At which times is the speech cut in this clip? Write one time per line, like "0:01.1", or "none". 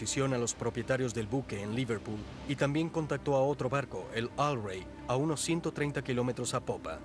0:04.6